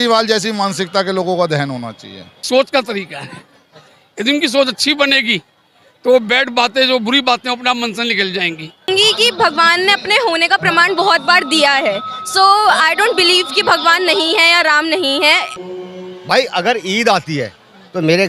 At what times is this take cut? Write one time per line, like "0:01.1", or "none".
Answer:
0:02.4
0:08.9
0:15.5